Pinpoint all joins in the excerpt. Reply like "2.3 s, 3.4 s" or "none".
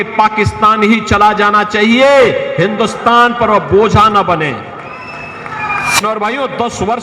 6.0 s